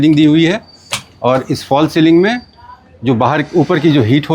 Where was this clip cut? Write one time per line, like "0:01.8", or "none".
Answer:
none

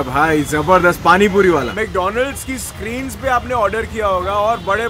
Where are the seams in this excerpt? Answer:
0:01.7

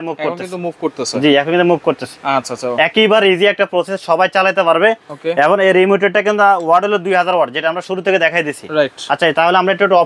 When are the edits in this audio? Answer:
none

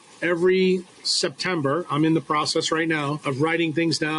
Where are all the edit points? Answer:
0:03.2

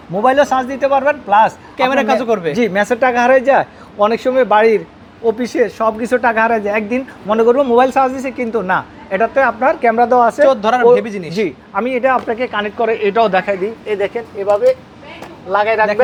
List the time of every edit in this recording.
none

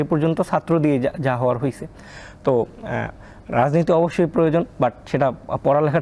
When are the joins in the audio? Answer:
none

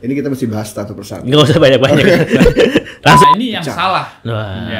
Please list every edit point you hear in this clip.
0:03.2

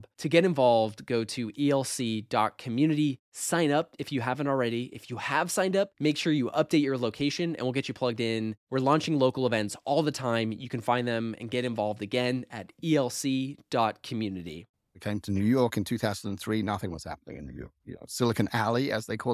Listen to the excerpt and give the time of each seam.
0:15.0

